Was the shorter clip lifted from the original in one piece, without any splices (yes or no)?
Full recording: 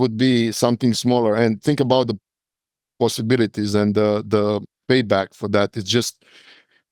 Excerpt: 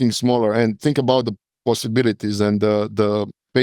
no